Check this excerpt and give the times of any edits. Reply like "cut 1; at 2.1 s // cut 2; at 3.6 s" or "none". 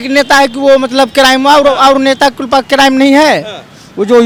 none